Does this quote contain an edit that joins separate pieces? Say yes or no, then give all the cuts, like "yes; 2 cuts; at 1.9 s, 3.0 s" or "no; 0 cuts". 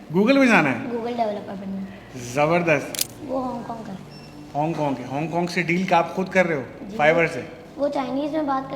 yes; 1 cut; at 3.0 s